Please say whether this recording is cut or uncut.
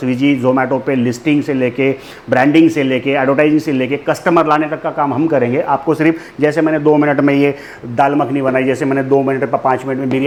uncut